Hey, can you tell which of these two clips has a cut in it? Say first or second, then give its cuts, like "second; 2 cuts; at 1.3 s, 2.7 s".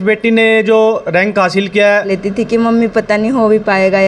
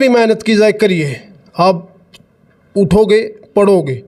first; 1 cut; at 2.1 s